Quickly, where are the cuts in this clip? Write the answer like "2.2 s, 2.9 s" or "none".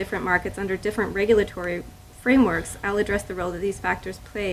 2.8 s